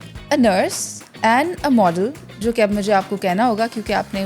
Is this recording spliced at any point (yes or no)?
no